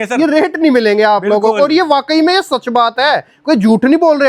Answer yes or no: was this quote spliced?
no